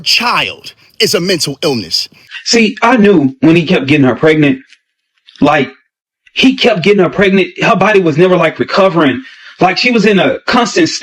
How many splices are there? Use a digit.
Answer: 1